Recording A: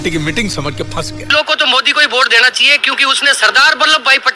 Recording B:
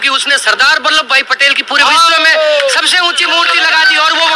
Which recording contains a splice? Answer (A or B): A